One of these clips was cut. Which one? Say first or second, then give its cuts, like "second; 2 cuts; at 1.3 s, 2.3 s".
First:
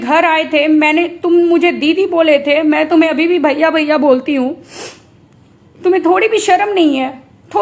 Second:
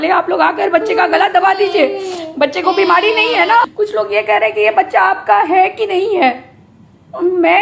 second; 1 cut; at 3.7 s